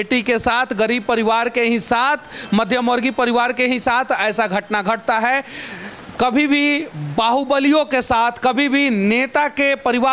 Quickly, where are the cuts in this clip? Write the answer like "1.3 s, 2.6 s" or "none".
none